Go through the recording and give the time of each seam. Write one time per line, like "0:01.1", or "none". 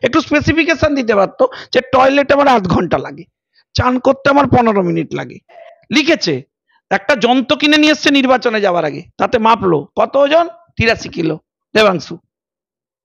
0:05.7